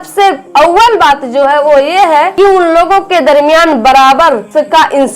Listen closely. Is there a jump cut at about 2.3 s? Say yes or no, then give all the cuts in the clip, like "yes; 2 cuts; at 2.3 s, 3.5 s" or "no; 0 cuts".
yes; 1 cut; at 2.3 s